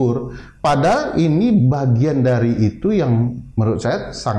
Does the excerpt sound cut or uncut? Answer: uncut